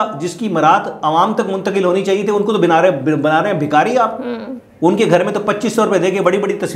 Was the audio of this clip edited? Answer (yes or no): no